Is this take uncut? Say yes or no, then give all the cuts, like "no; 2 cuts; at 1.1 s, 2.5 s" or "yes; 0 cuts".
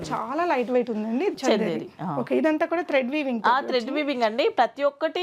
no; 1 cut; at 1.3 s